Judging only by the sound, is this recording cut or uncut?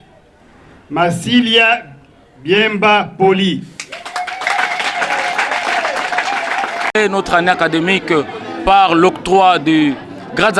cut